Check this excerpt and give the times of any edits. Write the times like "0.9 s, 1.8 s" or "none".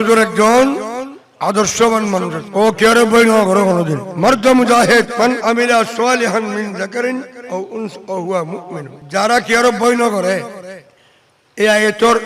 2.4 s, 4.0 s, 5.1 s, 8.9 s